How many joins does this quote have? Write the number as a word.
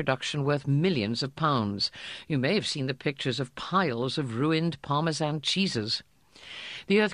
one